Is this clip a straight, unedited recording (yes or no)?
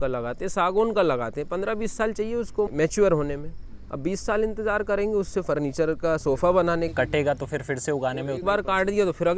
yes